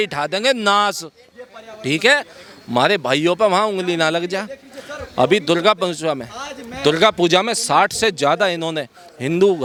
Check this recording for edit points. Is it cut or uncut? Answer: uncut